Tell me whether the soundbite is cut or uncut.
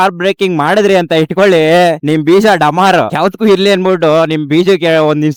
uncut